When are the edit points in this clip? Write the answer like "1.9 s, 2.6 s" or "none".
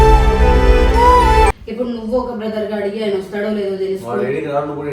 1.6 s